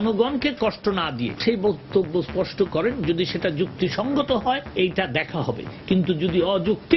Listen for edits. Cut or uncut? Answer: cut